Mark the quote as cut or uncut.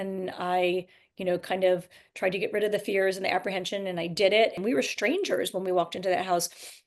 cut